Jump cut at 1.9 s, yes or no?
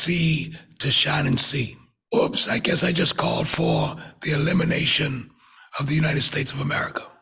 yes